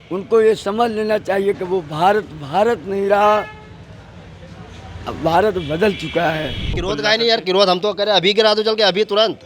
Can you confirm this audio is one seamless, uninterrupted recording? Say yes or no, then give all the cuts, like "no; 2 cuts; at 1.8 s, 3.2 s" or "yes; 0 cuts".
no; 1 cut; at 6.8 s